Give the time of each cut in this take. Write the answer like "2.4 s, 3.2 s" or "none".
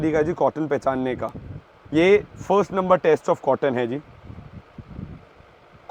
none